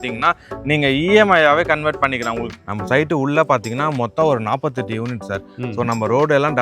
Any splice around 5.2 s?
no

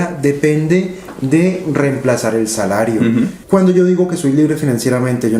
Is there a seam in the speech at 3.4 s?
yes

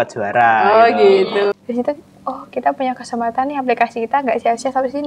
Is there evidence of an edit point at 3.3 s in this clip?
no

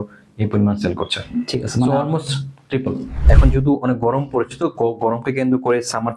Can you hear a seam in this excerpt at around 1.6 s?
no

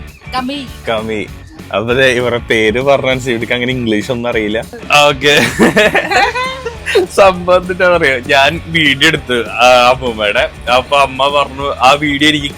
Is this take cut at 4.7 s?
yes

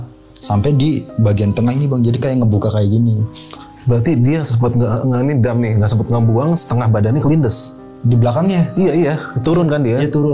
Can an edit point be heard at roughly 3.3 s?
yes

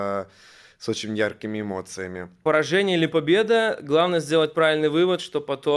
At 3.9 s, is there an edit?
no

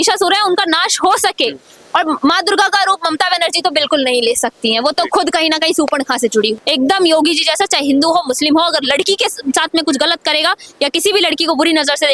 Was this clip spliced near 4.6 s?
no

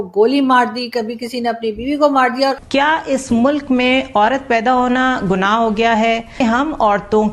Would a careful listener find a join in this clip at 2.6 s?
yes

